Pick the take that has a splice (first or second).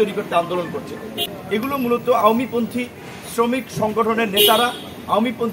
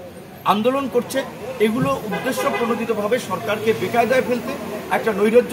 first